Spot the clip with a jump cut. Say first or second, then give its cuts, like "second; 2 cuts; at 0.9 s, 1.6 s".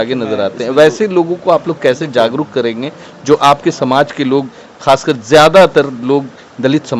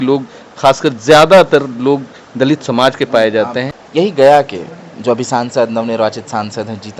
second; 1 cut; at 3.7 s